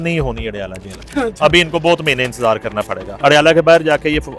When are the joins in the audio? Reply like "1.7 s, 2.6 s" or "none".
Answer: 3.0 s